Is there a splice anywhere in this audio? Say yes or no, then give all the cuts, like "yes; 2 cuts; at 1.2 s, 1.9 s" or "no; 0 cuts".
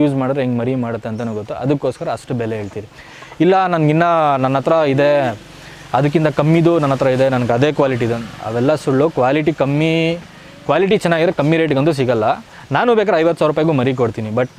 no; 0 cuts